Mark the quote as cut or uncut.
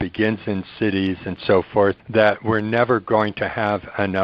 cut